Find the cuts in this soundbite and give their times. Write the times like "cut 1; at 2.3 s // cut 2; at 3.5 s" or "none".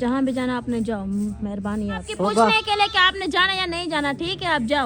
cut 1; at 2.1 s